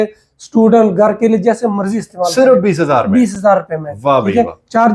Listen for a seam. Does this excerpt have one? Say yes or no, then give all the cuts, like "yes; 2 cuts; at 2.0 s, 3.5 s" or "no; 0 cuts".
no; 0 cuts